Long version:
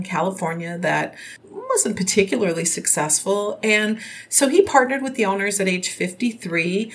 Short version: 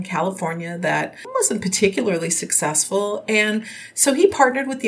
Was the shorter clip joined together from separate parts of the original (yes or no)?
yes